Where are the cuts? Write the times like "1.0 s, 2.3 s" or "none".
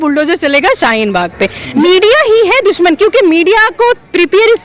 1.8 s